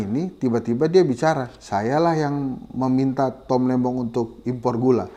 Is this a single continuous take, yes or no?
yes